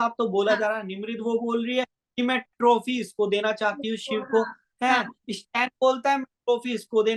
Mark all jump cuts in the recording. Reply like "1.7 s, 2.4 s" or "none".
none